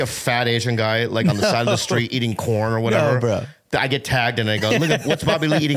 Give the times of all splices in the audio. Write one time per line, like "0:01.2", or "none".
none